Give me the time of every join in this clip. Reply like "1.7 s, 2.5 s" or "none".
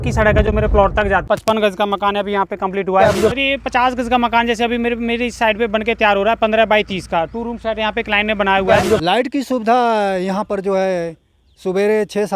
1.2 s, 8.9 s